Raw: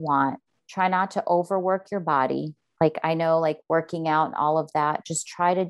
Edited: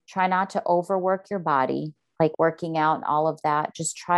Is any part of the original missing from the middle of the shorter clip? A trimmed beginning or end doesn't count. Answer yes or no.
yes